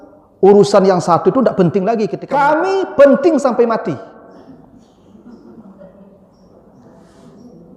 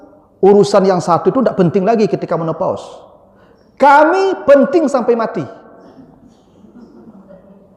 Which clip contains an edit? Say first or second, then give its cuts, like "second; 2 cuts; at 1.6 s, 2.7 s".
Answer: first; 1 cut; at 2.2 s